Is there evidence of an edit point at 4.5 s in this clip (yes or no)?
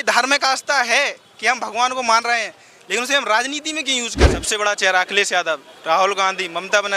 yes